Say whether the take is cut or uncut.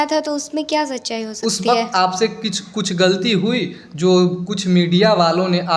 uncut